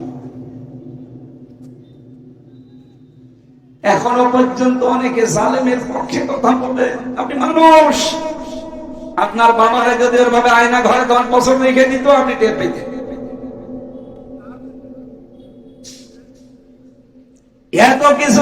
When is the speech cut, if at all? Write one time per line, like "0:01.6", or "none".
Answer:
none

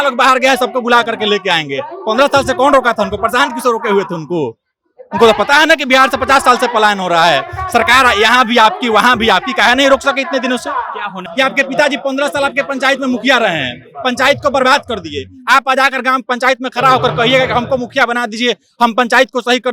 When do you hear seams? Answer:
0:11.2

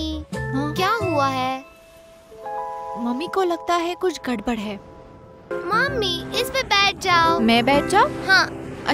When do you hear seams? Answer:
0:05.5

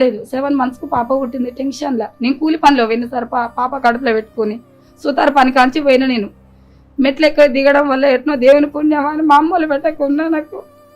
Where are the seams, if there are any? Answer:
none

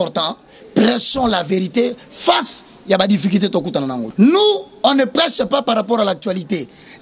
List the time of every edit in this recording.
0:04.1

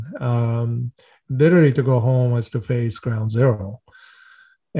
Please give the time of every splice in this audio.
0:01.1

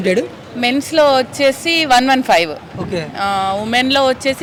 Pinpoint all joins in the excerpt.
none

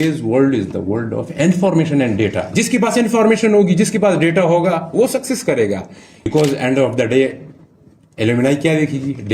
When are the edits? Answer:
0:06.3

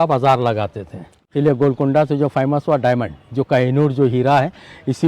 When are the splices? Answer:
0:01.3

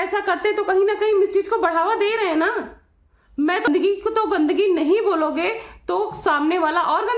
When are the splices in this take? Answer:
0:03.7

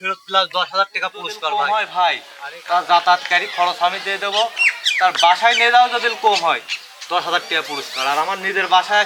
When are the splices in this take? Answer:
0:01.5

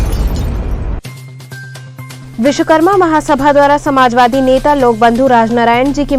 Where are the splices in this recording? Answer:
0:02.1

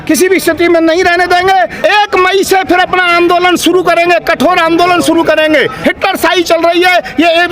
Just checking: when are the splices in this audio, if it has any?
0:01.7
0:05.7

